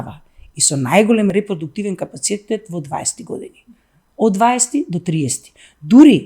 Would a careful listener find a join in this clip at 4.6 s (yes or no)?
no